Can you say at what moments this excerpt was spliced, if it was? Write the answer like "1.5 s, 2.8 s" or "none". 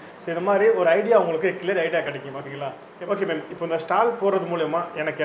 2.8 s